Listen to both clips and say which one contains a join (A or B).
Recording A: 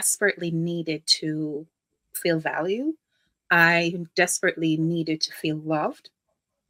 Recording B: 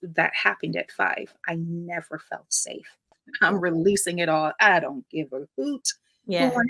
B